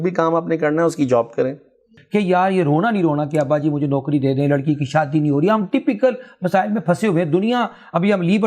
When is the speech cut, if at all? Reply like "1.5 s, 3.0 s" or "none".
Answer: 1.9 s